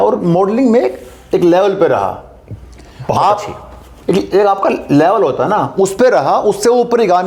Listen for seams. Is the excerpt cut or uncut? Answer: uncut